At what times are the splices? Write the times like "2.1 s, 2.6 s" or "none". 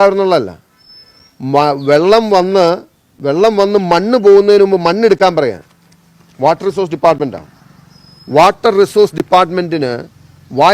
none

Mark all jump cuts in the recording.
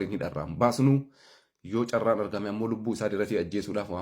none

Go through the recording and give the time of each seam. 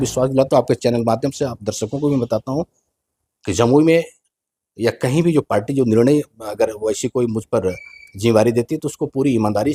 none

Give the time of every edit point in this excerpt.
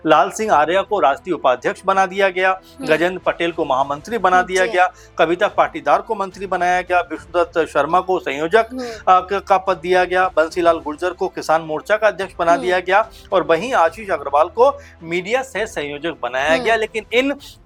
none

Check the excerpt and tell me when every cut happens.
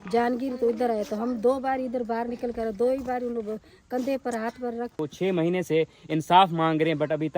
5.0 s

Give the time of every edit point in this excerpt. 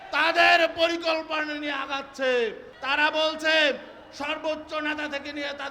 2.7 s

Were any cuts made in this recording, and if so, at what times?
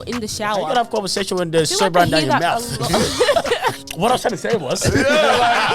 3.8 s

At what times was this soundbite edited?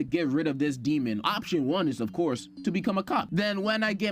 1.2 s, 3.3 s

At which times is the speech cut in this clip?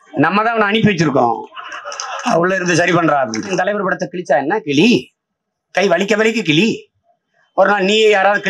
3.5 s

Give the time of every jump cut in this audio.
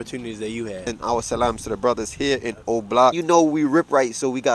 0.9 s, 3.2 s

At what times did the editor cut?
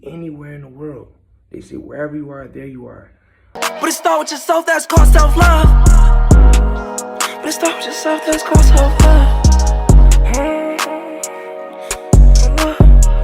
3.6 s

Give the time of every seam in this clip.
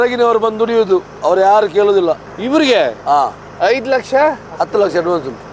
2.3 s

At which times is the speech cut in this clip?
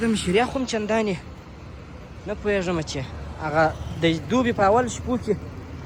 none

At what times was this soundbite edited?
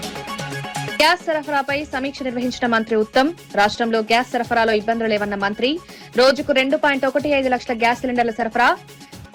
0.9 s

